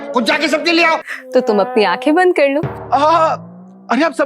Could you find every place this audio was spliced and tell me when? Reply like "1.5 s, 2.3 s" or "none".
1.1 s